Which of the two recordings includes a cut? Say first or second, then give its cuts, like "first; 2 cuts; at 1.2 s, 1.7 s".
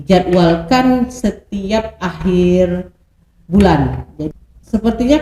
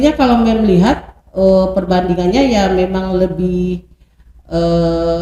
first; 1 cut; at 4.1 s